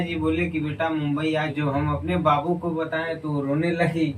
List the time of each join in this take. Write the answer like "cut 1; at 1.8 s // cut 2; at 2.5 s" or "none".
cut 1; at 1.5 s